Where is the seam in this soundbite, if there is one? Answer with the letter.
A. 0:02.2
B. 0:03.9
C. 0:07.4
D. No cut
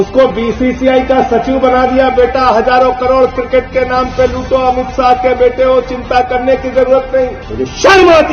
C